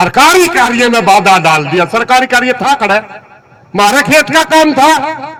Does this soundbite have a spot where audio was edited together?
no; 0 cuts

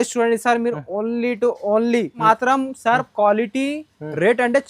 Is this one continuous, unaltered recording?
no; 1 cut; at 2.2 s

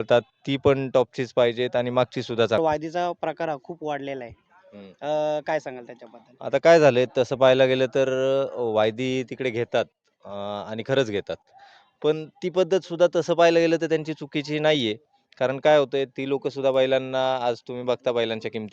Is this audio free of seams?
no; 1 cut; at 2.6 s

